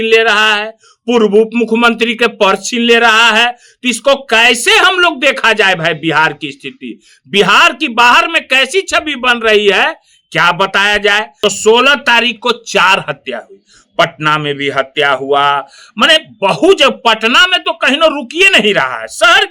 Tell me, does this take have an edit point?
yes; 1 cut; at 11.3 s

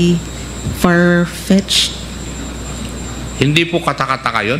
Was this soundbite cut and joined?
no; 0 cuts

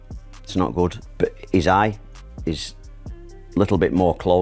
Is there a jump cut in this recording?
yes; 1 cut; at 1.0 s

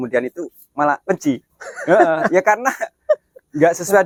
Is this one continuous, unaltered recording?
yes; 0 cuts

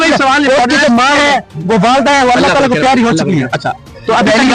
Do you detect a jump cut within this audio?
no; 0 cuts

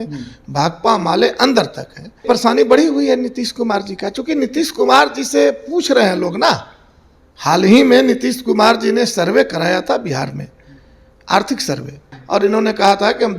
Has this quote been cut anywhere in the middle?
yes; 2 cuts; at 2.2 s, 12.1 s

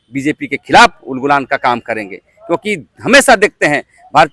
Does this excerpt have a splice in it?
no; 0 cuts

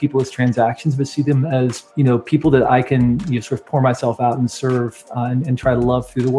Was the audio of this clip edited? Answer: yes; 1 cut; at 1.8 s

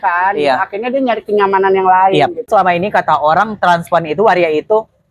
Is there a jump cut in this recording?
yes; 1 cut; at 2.5 s

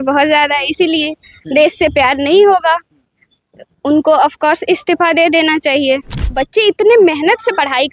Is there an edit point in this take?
yes; 1 cut; at 6.3 s

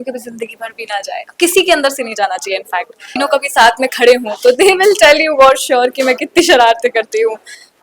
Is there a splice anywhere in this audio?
yes; 1 cut; at 3.1 s

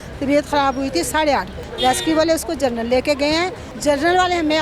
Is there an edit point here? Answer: yes; 2 cuts; at 1.6 s, 3.7 s

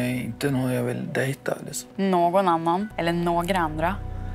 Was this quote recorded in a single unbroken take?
no; 2 cuts; at 1.8 s, 2.9 s

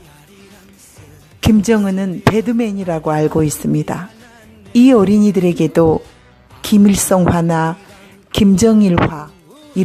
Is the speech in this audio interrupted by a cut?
yes; 1 cut; at 5.3 s

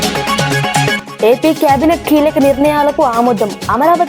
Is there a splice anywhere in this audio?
yes; 1 cut; at 0.9 s

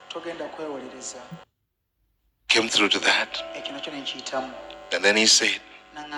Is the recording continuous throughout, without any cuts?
no; 1 cut; at 1.8 s

